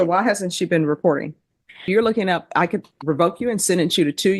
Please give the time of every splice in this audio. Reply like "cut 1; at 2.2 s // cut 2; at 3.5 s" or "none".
cut 1; at 1.9 s